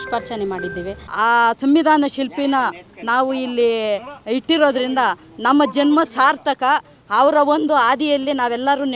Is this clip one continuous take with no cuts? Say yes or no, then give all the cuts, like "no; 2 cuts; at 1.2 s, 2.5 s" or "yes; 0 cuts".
no; 1 cut; at 1.0 s